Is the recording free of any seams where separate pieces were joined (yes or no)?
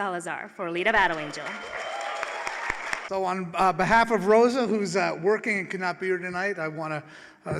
no